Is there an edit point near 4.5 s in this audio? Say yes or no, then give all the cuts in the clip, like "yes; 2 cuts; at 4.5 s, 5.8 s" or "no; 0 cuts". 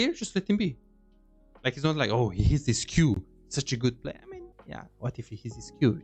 yes; 1 cut; at 4.5 s